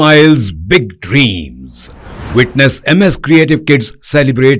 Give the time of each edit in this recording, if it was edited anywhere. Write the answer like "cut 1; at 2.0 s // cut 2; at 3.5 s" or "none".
none